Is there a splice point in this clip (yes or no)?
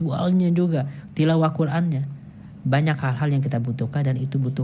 yes